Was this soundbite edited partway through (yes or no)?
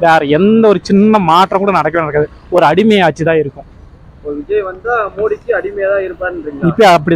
no